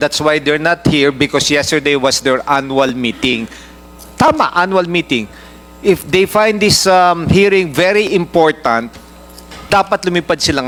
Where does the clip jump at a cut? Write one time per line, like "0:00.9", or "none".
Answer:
none